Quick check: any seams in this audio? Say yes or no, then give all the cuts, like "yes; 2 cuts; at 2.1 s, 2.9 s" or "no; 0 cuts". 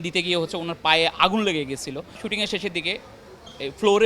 yes; 1 cut; at 2.2 s